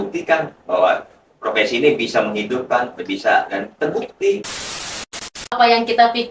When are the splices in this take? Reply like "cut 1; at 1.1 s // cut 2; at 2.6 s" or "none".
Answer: cut 1; at 5.0 s

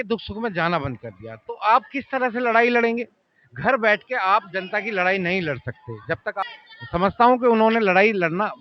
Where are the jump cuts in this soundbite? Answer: cut 1; at 6.4 s

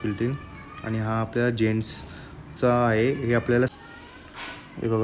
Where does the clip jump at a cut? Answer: cut 1; at 3.7 s

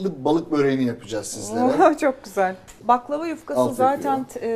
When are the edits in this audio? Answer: cut 1; at 2.8 s

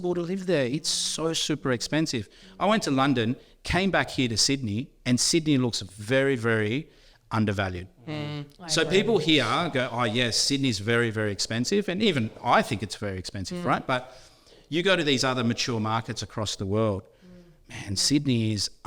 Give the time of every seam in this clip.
none

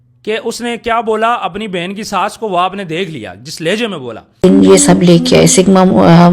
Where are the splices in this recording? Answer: cut 1; at 4.3 s

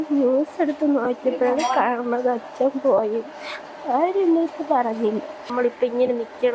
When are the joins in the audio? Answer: cut 1; at 5.5 s

